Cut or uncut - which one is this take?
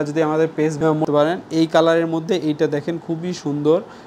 cut